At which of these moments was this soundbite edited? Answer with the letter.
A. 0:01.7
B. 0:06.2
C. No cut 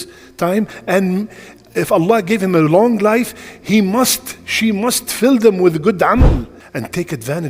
B